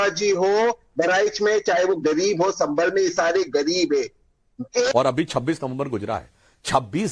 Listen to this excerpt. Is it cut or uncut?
cut